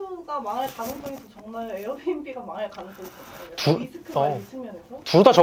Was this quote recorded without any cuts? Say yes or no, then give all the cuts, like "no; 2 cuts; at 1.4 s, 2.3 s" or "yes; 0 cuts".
yes; 0 cuts